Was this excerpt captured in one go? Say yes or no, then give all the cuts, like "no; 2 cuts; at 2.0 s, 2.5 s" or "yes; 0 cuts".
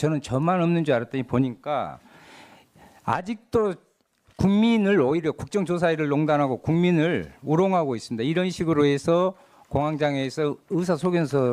no; 1 cut; at 2.7 s